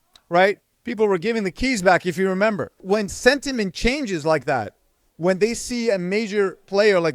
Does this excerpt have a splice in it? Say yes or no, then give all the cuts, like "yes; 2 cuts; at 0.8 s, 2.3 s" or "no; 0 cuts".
yes; 1 cut; at 2.8 s